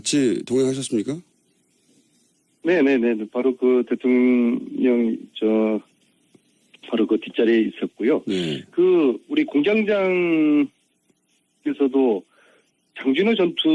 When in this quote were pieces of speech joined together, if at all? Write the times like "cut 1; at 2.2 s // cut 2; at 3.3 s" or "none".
cut 1; at 7.0 s